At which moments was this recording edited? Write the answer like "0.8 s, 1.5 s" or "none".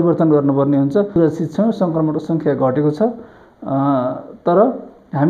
1.1 s